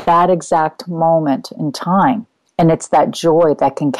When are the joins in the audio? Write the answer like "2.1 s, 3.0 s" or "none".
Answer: 2.4 s